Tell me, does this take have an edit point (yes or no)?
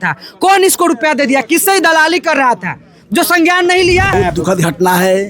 yes